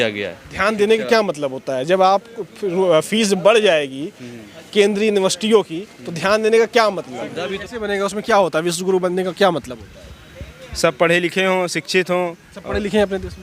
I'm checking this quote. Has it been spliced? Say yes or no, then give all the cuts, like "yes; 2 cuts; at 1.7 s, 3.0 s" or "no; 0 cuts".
yes; 1 cut; at 7.6 s